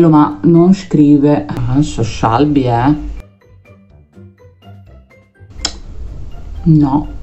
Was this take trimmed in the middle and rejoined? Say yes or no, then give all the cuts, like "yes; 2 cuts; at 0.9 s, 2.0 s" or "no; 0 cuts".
yes; 1 cut; at 1.6 s